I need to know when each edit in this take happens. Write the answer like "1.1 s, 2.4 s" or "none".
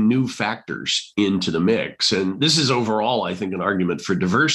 none